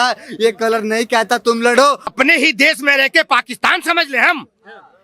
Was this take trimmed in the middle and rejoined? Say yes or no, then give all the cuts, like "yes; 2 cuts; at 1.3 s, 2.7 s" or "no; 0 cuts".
yes; 1 cut; at 2.1 s